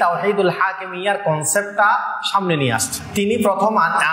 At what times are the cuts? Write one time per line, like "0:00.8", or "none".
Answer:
0:03.0